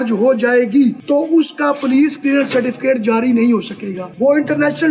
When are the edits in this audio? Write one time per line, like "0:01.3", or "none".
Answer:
none